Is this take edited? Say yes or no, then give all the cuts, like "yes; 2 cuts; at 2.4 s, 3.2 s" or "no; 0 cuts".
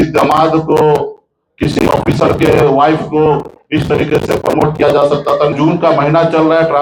yes; 1 cut; at 5.5 s